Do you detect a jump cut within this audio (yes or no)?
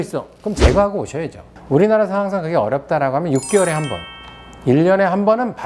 no